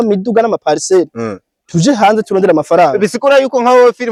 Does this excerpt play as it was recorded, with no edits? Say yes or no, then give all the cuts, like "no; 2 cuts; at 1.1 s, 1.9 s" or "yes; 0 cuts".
yes; 0 cuts